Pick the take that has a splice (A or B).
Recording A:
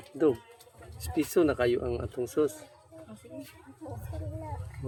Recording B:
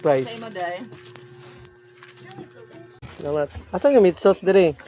B